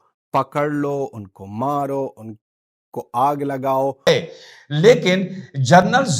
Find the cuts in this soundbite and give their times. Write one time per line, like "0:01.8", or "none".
0:04.1